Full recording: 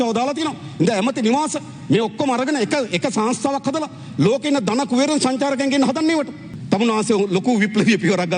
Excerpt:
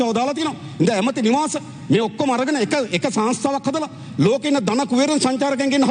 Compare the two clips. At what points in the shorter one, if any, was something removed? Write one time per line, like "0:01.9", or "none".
none